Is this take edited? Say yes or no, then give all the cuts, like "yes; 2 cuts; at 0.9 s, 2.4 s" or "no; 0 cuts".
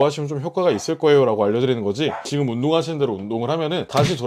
yes; 1 cut; at 2.2 s